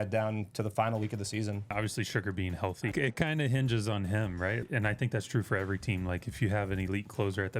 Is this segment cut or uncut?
cut